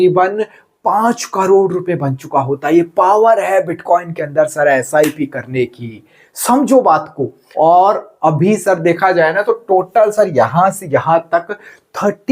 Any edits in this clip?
yes; 1 cut; at 7.4 s

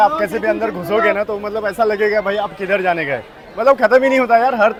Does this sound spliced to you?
no; 0 cuts

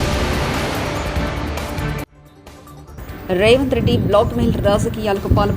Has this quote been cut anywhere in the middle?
yes; 1 cut; at 2.1 s

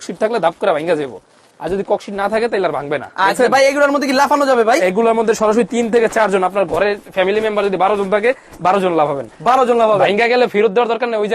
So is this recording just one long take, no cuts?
yes; 0 cuts

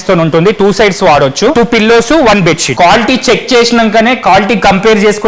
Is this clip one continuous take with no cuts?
no; 2 cuts; at 1.5 s, 2.7 s

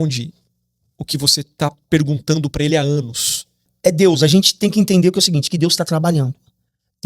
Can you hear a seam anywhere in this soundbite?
yes; 1 cut; at 3.7 s

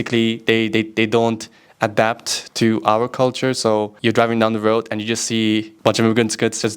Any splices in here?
yes; 2 cuts; at 3.9 s, 5.7 s

